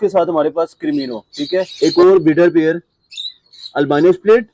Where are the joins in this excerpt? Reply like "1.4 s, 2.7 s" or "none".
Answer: 1.7 s